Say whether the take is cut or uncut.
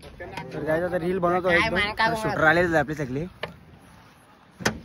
uncut